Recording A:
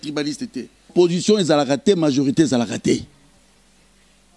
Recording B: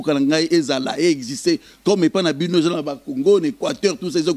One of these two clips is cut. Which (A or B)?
A